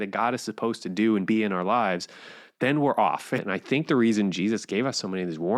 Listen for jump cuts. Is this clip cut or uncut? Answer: cut